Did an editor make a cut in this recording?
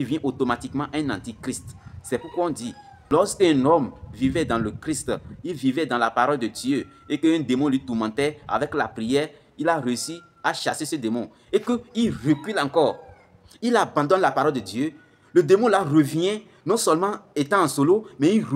yes; 1 cut; at 3.1 s

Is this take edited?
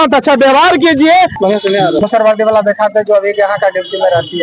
yes; 1 cut; at 1.3 s

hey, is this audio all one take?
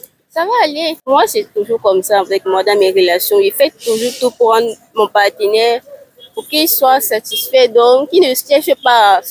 no; 1 cut; at 1.0 s

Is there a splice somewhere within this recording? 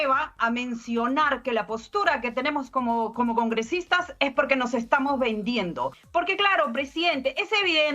yes; 1 cut; at 6.0 s

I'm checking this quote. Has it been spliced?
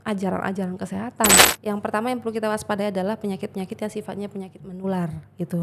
yes; 1 cut; at 1.4 s

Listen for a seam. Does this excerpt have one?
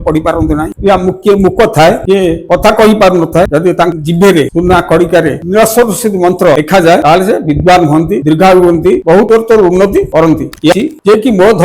yes; 1 cut; at 10.7 s

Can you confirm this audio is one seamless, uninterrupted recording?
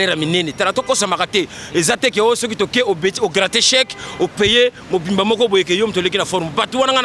yes; 0 cuts

